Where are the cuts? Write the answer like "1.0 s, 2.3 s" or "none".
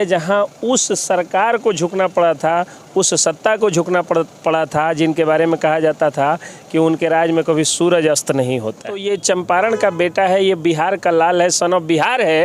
8.9 s